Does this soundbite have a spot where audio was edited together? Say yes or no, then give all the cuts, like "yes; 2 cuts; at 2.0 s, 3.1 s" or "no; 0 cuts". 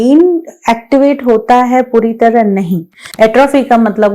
yes; 1 cut; at 3.0 s